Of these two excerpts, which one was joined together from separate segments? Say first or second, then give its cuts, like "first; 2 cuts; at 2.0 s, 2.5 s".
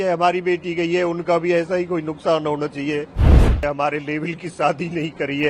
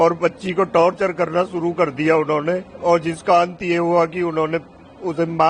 first; 1 cut; at 3.5 s